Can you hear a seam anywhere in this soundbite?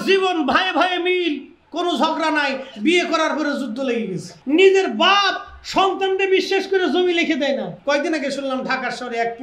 yes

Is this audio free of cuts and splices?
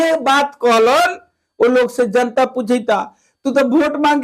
yes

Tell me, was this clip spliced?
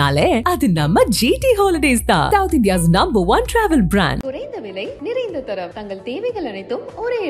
no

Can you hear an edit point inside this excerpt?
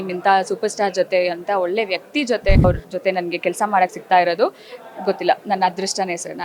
yes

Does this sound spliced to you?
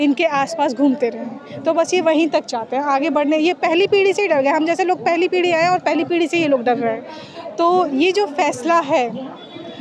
yes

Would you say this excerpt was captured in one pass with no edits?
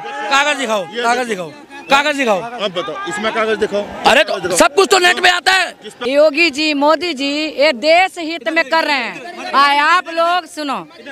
no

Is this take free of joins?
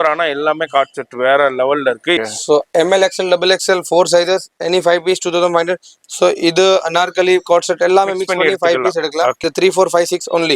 no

